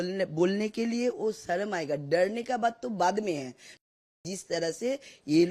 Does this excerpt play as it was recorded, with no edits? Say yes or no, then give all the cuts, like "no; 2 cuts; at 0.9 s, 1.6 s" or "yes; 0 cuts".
no; 1 cut; at 3.8 s